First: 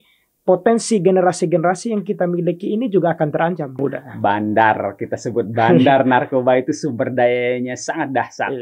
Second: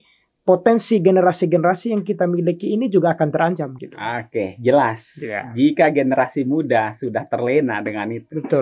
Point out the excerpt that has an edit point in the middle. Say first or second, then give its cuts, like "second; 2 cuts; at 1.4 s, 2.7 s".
first; 1 cut; at 3.8 s